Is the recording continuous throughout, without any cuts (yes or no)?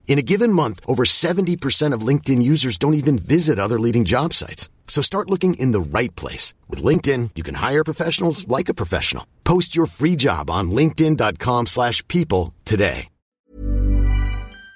no